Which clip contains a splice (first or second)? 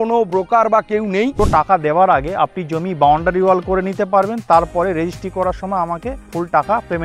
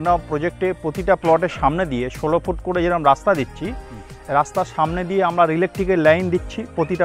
first